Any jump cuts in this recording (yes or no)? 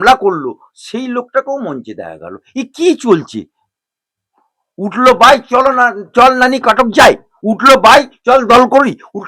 no